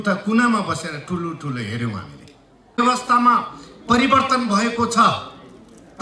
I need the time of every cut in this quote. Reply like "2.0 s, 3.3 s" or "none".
2.8 s